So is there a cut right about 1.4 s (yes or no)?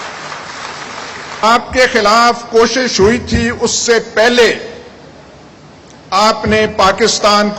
yes